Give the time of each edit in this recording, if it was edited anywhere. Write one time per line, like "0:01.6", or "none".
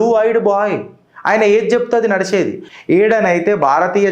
0:02.7